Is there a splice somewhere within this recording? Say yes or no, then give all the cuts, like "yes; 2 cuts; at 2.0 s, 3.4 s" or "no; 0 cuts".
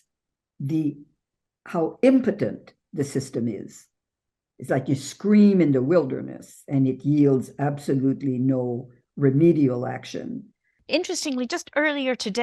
no; 0 cuts